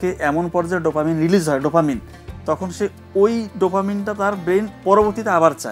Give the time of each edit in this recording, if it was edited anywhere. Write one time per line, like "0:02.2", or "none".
none